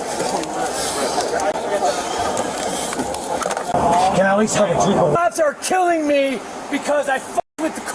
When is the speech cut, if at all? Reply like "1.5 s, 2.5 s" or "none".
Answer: 5.1 s